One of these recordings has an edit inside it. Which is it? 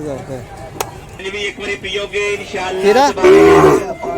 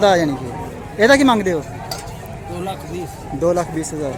first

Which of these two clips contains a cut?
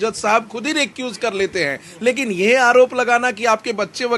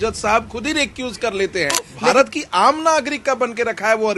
second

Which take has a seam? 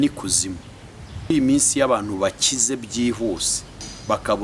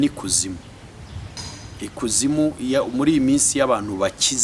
first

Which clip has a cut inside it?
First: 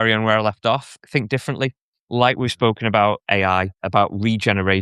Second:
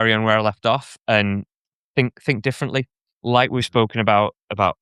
first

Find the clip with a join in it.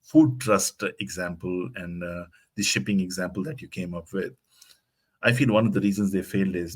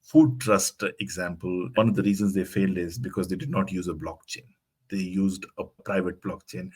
second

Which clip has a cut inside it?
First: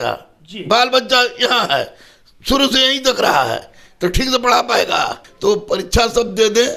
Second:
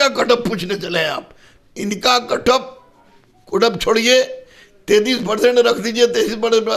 first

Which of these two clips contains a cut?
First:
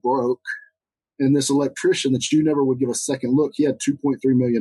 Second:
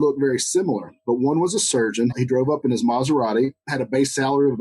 second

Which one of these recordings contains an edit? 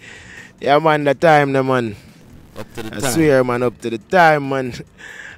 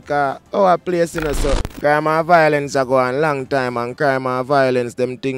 second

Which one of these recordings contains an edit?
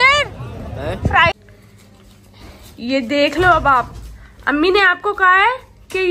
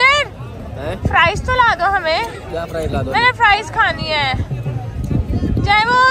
first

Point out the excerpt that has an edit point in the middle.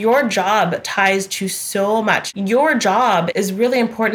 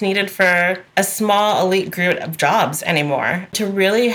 first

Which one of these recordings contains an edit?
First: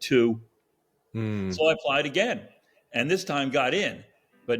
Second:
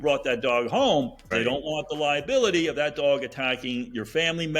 second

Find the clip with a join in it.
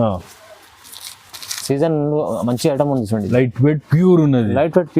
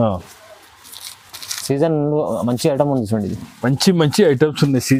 first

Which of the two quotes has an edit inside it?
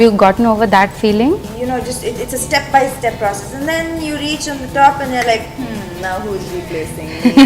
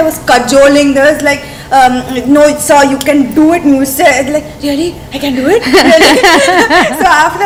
first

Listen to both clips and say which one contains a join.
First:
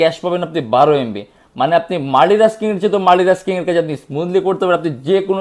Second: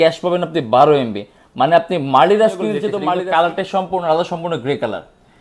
second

